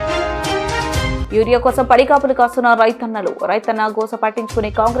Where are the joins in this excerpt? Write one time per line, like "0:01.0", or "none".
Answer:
0:01.2